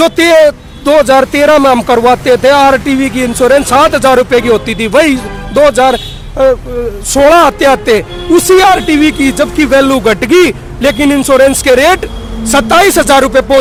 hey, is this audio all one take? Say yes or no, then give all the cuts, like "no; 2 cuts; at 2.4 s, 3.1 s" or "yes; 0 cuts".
yes; 0 cuts